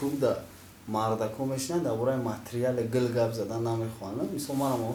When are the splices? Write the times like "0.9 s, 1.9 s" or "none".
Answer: none